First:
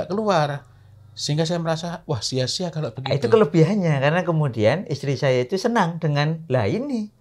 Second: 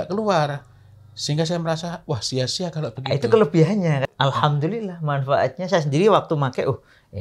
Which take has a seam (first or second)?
second